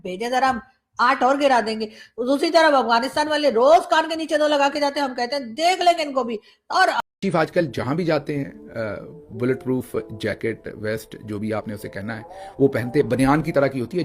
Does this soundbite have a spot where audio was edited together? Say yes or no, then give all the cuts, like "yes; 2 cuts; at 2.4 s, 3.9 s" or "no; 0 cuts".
yes; 1 cut; at 7.0 s